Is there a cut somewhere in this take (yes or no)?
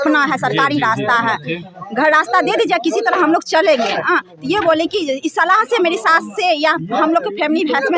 no